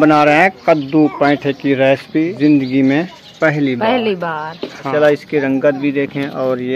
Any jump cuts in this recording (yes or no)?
yes